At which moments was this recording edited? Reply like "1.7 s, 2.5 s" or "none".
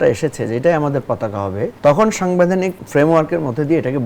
1.7 s, 2.8 s